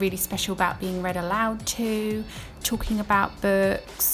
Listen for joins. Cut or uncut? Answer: uncut